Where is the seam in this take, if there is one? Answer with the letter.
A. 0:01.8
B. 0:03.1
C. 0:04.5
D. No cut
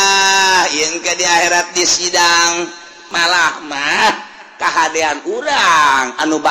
B